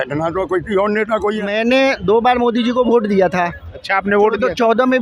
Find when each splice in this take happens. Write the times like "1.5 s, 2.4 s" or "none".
1.5 s